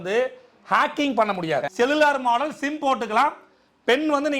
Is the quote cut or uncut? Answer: cut